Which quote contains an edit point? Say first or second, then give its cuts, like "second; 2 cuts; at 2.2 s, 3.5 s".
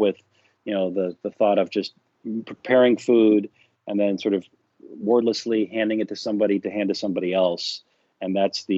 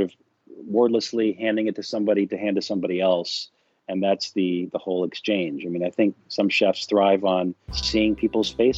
second; 1 cut; at 7.8 s